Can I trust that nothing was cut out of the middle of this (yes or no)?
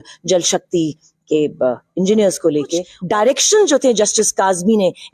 no